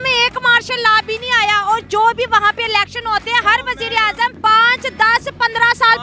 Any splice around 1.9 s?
no; 1 cut; at 4.4 s

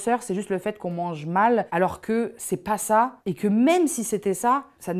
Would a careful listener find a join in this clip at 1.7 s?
yes; 1 cut; at 1.7 s

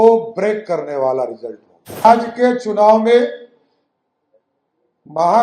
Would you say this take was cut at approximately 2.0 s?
yes; 1 cut; at 2.0 s

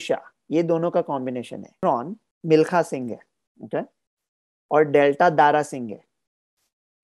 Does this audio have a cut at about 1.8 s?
yes; 1 cut; at 1.8 s

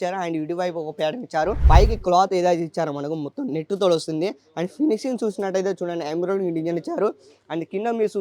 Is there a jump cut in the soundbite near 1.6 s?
yes; 1 cut; at 1.6 s

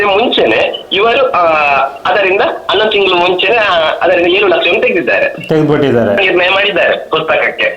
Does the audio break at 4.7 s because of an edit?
no; 1 cut; at 6.2 s

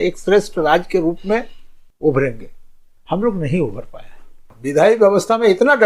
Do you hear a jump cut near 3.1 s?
no; 1 cut; at 4.6 s

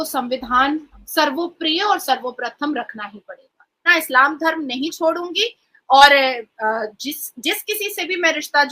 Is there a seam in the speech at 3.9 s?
yes; 1 cut; at 3.9 s

